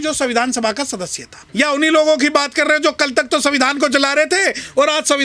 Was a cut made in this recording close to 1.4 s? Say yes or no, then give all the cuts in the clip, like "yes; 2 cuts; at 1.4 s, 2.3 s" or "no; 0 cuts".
yes; 1 cut; at 1.4 s